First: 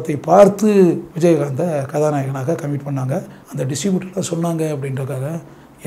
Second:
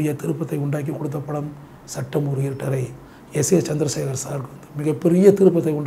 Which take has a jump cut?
first; 2 cuts; at 1.1 s, 3.4 s

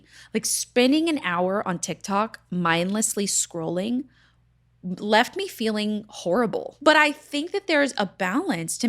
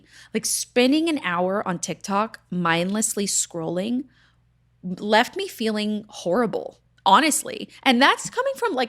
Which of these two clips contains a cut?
first; 1 cut; at 6.7 s

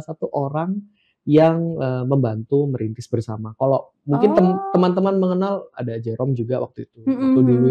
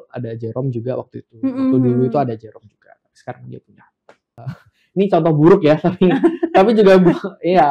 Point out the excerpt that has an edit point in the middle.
second; 1 cut; at 4.5 s

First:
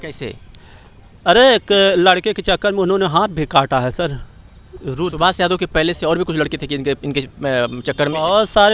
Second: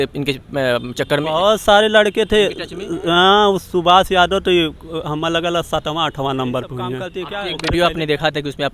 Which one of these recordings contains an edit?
second; 1 cut; at 7.1 s

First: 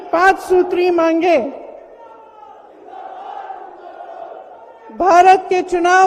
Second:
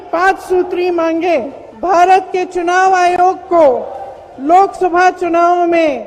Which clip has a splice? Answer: second; 1 cut; at 1.6 s

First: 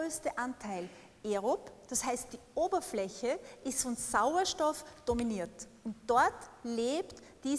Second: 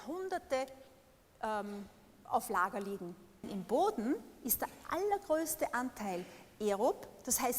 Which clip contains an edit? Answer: second; 1 cut; at 3.5 s

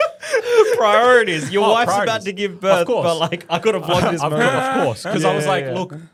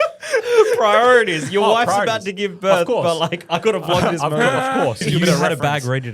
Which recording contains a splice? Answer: second; 1 cut; at 5.0 s

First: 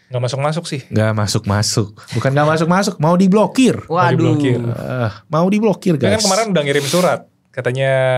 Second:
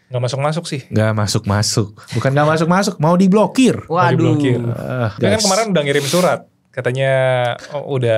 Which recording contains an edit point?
second; 1 cut; at 5.2 s

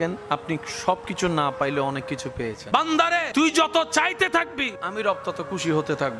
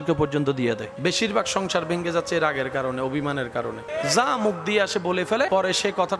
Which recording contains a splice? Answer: first; 1 cut; at 2.7 s

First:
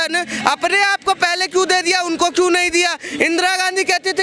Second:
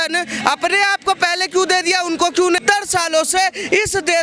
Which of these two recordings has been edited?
second; 1 cut; at 2.6 s

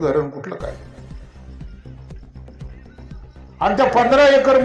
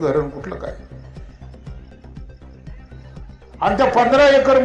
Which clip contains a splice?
second; 2 cuts; at 0.9 s, 3.6 s

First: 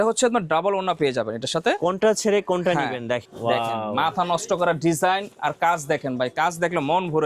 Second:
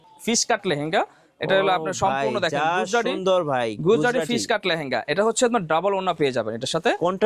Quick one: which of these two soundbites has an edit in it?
first; 1 cut; at 3.3 s

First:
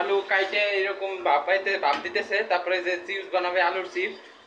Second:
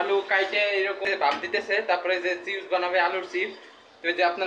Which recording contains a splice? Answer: second; 1 cut; at 1.1 s

